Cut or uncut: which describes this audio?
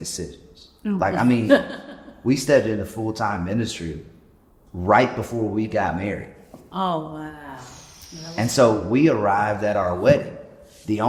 uncut